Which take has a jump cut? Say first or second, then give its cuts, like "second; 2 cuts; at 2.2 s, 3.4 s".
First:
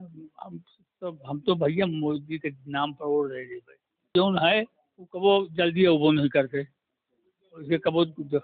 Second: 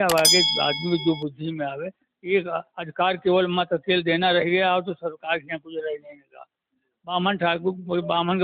first; 1 cut; at 4.1 s